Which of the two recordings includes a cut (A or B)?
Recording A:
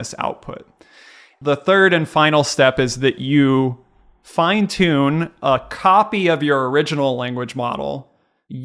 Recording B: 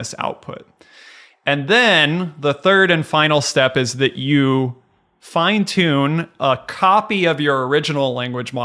A